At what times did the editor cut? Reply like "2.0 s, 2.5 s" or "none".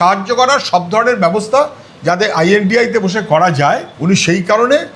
none